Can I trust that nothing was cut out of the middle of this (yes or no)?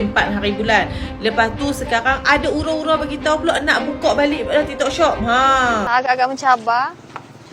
no